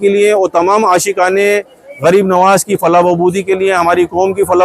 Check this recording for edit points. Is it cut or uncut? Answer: uncut